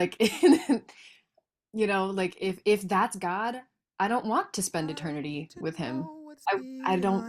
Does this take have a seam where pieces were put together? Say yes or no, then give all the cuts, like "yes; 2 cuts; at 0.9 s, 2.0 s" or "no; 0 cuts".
yes; 1 cut; at 6.2 s